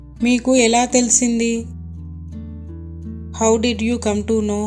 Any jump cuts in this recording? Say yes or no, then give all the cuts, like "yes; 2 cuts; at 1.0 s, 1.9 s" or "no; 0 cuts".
no; 0 cuts